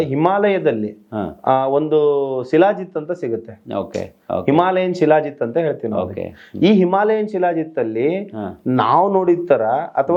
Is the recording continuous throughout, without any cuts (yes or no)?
yes